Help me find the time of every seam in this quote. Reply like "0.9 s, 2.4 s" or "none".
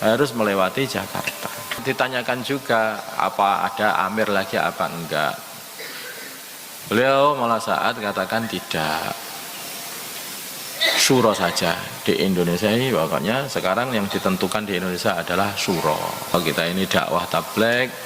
1.8 s, 16.3 s

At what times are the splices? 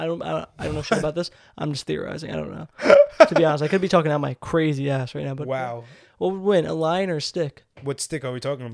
7.7 s

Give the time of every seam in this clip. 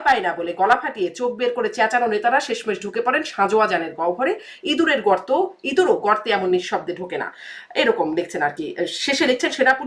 none

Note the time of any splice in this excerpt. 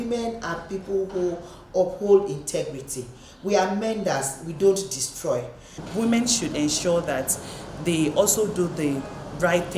5.8 s

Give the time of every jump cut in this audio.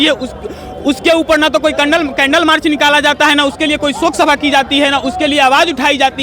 none

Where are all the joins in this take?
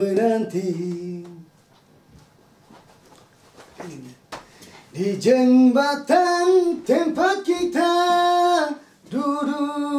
none

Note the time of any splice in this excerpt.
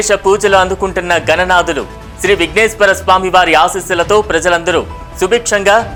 none

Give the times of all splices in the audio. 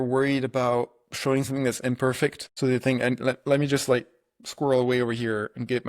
2.4 s

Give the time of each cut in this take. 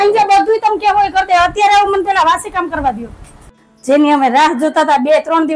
3.5 s

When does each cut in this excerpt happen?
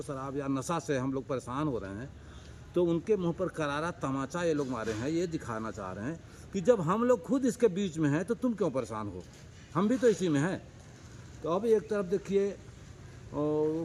none

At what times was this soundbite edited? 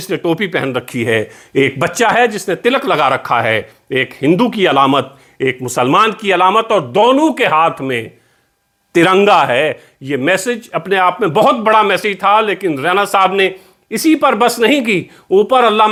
none

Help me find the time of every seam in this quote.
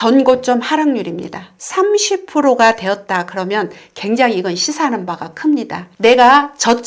1.6 s, 5.9 s

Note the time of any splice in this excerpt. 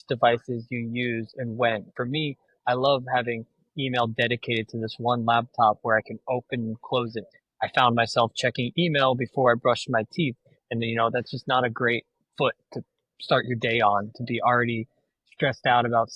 1.9 s, 7.3 s

